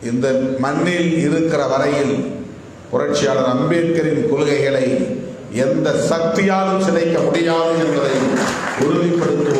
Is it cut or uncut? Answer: uncut